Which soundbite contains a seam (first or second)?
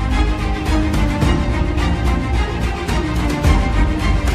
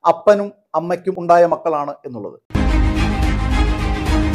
second